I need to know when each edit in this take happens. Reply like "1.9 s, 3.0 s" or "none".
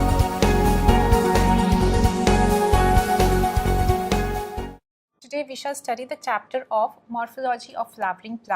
1.0 s